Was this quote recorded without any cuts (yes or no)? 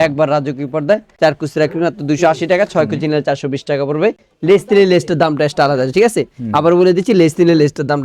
yes